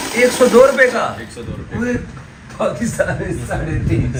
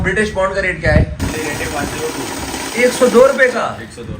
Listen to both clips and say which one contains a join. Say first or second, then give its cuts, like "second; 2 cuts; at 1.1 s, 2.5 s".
second; 1 cut; at 1.2 s